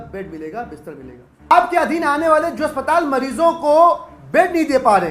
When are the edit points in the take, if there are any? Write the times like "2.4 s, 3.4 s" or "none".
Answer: 1.5 s